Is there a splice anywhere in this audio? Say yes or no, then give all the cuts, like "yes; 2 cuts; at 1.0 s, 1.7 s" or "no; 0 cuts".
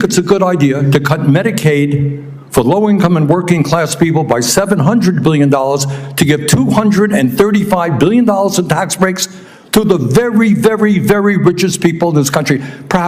no; 0 cuts